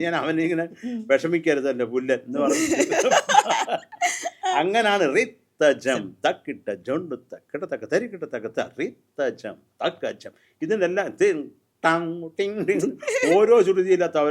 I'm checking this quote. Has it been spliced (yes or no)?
no